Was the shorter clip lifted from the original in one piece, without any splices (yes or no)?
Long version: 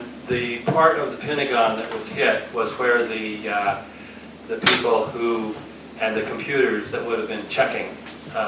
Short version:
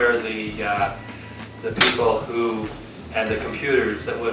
yes